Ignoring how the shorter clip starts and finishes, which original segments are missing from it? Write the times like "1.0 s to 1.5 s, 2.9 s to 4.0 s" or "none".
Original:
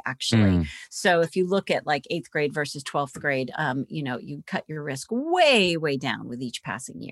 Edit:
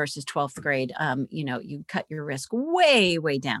none

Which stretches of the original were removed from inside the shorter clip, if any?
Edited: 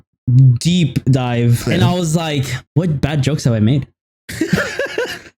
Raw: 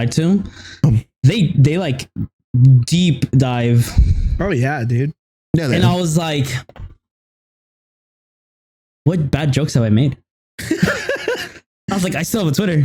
3.9 s to 5.7 s, 6.6 s to 8.9 s

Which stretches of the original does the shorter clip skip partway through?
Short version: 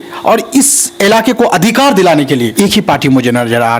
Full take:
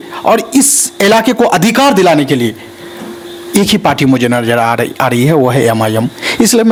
2.5 s to 3.5 s

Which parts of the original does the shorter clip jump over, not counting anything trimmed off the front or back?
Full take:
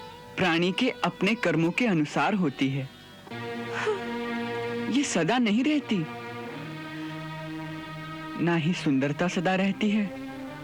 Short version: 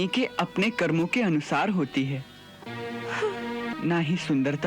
4.4 s to 8.3 s

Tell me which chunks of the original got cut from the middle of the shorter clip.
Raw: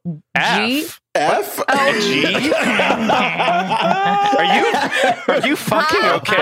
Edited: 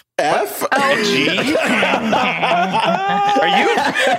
none

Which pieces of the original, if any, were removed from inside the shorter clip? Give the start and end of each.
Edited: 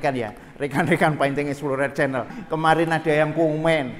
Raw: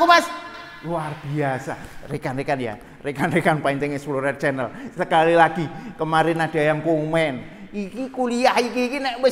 4.8 s to 5.8 s

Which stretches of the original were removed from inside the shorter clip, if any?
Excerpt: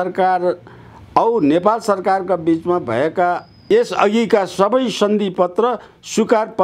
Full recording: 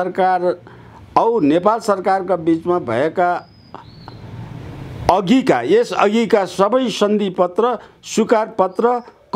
3.6 s to 5.6 s

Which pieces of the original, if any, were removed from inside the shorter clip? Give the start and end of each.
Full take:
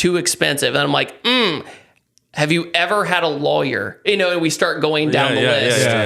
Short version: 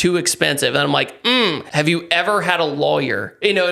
1.6 s to 2.3 s

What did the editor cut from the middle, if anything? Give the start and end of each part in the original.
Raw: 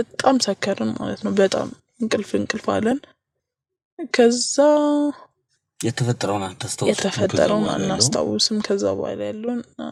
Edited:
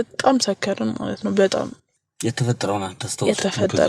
1.8 s to 5.4 s

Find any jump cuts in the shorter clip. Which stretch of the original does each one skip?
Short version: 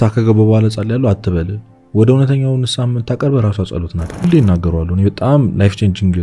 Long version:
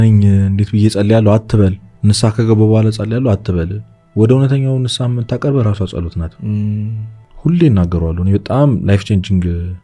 6.5 s to 7.5 s

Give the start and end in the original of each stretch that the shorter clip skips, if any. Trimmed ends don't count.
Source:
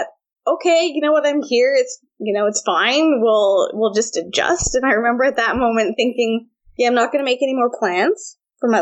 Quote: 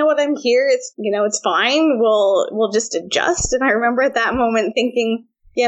2.0 s to 2.2 s

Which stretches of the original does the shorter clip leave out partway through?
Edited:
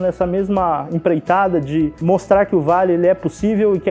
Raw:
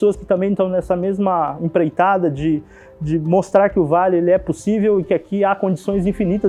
2.7 s to 3.2 s

